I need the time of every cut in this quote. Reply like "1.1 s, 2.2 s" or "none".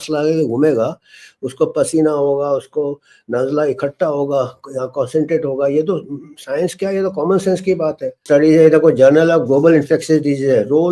8.2 s